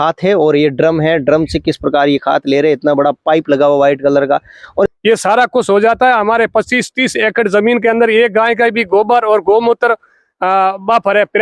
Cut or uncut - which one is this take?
cut